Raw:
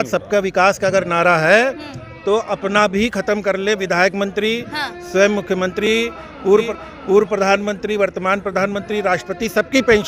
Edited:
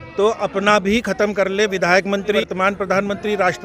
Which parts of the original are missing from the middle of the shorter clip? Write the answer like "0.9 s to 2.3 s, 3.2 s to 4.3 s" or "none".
4.5 s to 8.1 s